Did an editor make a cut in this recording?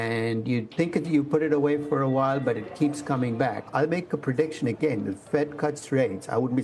yes; 1 cut; at 3.7 s

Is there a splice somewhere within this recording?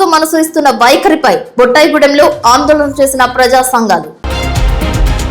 yes; 1 cut; at 4.1 s

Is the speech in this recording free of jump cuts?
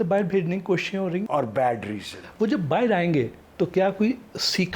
no; 1 cut; at 1.2 s

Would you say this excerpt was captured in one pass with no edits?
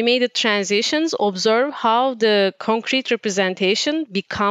yes; 0 cuts

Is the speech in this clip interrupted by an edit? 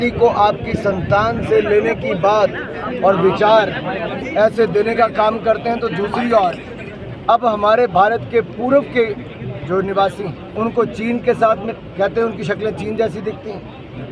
yes; 1 cut; at 10.4 s

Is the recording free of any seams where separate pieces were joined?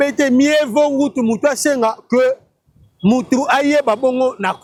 yes; 0 cuts

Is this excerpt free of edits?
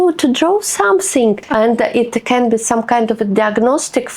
no; 1 cut; at 1.4 s

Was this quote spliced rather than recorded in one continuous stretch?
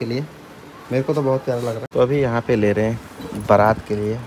yes; 1 cut; at 1.8 s

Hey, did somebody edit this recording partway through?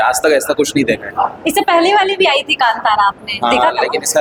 no; 0 cuts

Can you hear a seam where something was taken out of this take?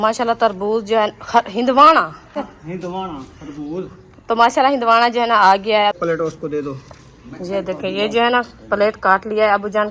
yes; 2 cuts; at 2.5 s, 6.0 s

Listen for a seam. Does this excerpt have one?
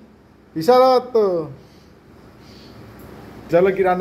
no; 0 cuts

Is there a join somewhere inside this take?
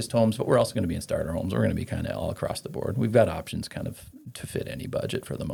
no; 0 cuts

